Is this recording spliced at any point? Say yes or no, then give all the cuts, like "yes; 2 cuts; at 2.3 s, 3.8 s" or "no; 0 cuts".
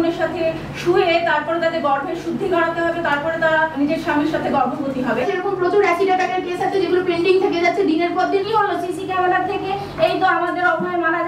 yes; 3 cuts; at 3.7 s, 5.2 s, 8.4 s